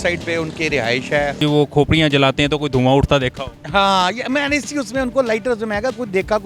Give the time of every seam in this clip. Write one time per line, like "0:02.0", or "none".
0:01.4